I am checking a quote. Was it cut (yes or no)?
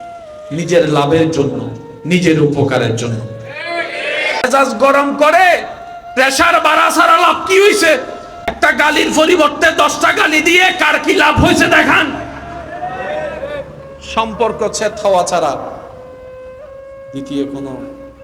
yes